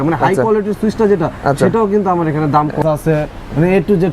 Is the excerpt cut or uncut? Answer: cut